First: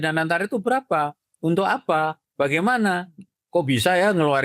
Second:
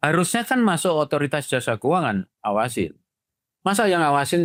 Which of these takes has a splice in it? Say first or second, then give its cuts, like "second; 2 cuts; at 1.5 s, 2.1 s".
first; 1 cut; at 2.2 s